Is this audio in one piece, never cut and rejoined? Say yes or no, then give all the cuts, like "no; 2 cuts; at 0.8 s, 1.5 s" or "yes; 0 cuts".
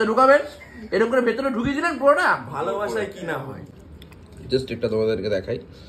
no; 1 cut; at 3.7 s